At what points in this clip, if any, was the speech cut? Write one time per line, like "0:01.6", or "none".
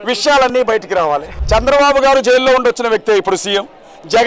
0:01.3